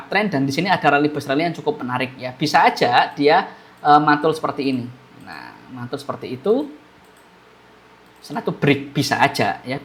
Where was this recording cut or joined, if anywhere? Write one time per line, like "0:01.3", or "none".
none